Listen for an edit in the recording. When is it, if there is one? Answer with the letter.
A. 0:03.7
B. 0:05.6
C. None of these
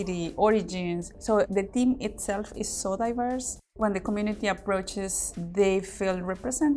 A